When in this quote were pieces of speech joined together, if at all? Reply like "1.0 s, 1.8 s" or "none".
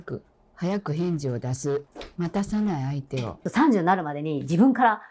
2.0 s, 3.3 s